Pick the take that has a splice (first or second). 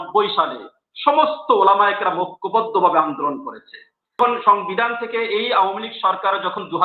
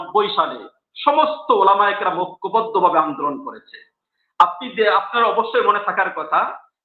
first